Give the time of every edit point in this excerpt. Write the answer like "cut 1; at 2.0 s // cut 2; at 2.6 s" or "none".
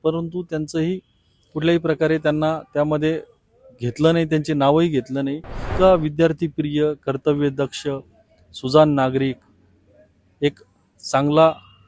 cut 1; at 5.7 s